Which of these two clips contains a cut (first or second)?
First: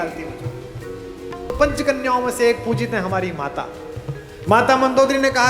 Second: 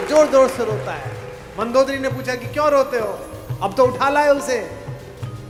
first